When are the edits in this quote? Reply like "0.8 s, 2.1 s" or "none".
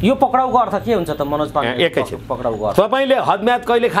none